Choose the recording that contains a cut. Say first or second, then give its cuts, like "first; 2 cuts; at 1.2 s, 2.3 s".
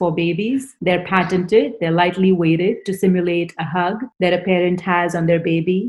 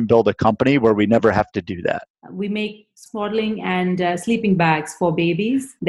second; 1 cut; at 2.0 s